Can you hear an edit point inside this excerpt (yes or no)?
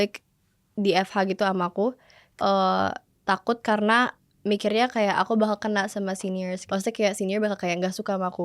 yes